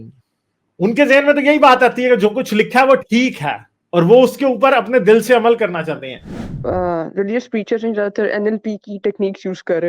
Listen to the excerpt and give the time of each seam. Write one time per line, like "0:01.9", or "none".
0:06.4